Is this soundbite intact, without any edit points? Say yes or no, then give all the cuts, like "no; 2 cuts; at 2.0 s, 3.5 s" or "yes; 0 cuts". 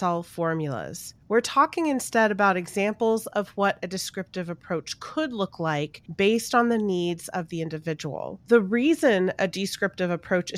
no; 1 cut; at 6.0 s